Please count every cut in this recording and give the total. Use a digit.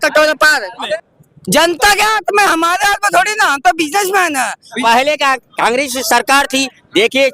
2